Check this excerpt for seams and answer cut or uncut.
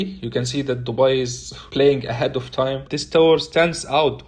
cut